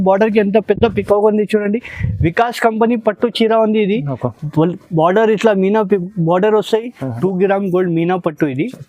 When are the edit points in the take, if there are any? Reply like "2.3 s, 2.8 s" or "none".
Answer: 7.0 s

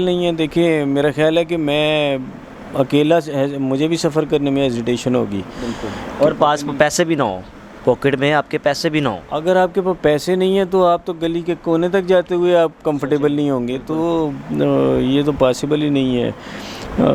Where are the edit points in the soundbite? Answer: none

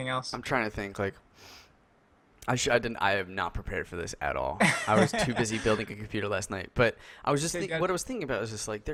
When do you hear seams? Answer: none

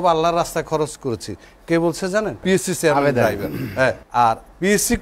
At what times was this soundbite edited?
2.4 s, 4.0 s

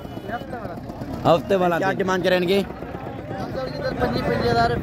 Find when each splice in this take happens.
1.9 s

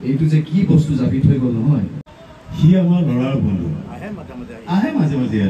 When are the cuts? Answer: 2.0 s

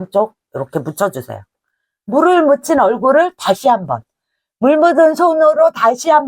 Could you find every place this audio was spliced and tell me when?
none

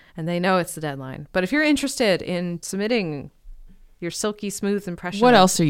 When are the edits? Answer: 2.6 s

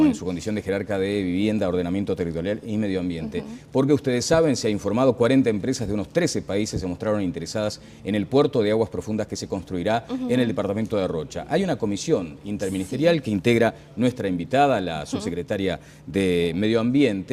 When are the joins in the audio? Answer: none

